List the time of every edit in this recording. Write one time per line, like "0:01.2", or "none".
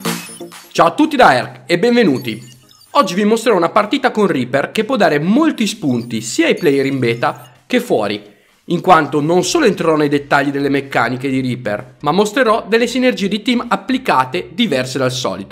0:10.2